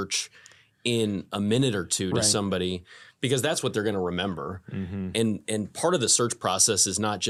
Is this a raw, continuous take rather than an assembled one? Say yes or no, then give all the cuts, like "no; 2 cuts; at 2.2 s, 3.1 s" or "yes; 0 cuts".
yes; 0 cuts